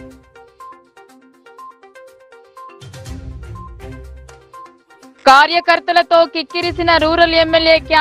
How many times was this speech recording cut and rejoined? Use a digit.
2